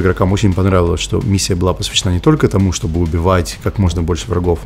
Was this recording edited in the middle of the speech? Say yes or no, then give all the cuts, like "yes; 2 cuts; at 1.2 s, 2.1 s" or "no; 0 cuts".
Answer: no; 0 cuts